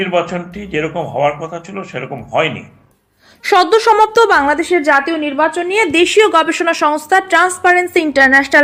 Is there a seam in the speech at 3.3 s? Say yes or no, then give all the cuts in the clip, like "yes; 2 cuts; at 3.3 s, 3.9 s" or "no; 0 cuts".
no; 0 cuts